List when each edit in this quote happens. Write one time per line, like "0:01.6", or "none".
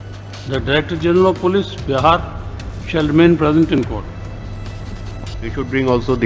0:05.2